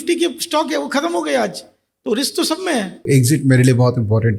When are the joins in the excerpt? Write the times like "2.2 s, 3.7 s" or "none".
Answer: 3.0 s